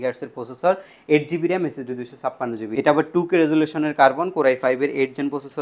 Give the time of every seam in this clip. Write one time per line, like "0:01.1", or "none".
0:02.6